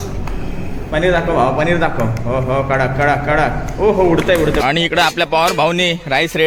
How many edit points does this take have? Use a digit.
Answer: 1